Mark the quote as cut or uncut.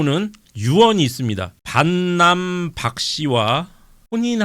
cut